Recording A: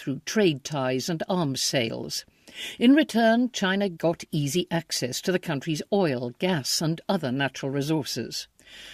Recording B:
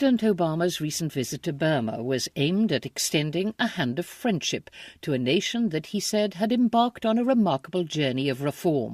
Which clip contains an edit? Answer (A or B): B